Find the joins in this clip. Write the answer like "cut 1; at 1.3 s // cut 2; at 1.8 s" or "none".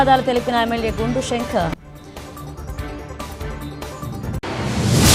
cut 1; at 2.3 s // cut 2; at 4.4 s